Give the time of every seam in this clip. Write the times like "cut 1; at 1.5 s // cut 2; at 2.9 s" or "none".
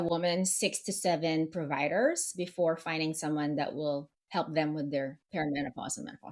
none